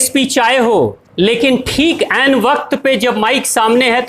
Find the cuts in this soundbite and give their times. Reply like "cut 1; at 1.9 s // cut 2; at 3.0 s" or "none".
cut 1; at 1.0 s

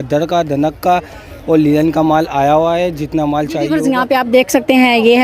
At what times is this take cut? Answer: cut 1; at 3.8 s

